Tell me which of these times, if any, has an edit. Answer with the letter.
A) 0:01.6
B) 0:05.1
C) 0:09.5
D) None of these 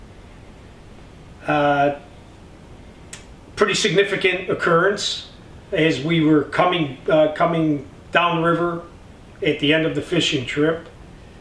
B